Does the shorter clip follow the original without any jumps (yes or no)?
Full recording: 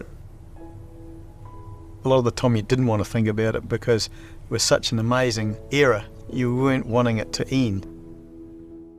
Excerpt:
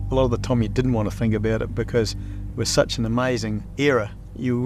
yes